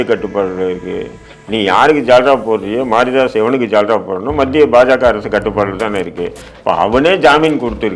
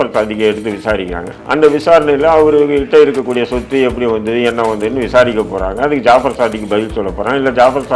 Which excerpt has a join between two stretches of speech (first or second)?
second